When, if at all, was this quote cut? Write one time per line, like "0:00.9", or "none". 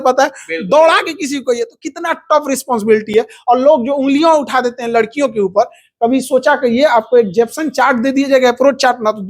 none